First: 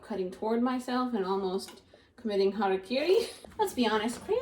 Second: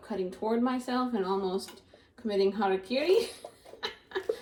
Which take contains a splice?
first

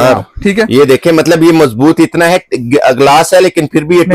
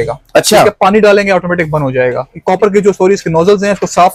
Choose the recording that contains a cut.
second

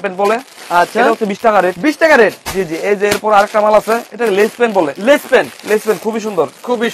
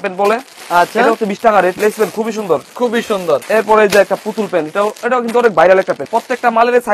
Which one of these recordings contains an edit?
second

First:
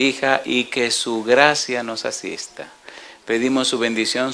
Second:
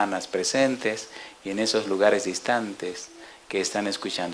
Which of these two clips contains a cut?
first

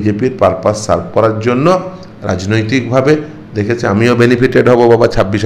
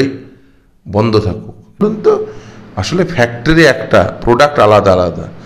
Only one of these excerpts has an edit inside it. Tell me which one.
second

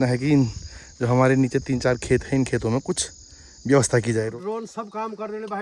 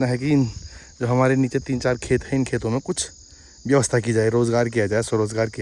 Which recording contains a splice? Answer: first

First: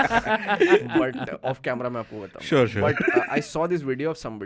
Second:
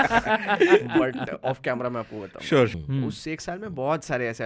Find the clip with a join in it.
second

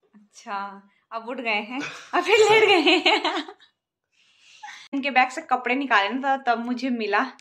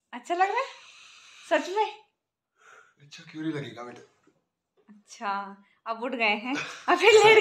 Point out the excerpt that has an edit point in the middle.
first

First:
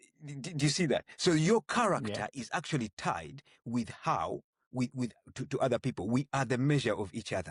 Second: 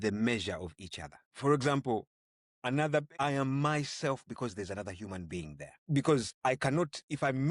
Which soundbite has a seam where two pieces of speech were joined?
second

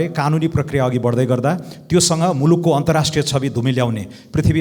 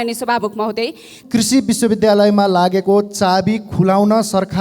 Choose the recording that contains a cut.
second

